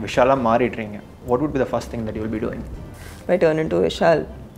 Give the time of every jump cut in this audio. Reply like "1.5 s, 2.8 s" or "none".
1.1 s, 3.0 s